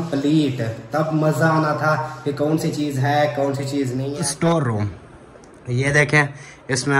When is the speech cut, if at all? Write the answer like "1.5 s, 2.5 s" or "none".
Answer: 4.1 s